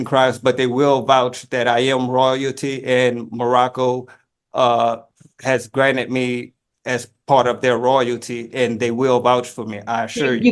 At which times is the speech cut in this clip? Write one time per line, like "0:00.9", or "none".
none